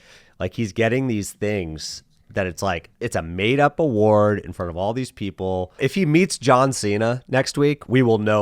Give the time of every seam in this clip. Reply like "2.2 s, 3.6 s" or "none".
5.8 s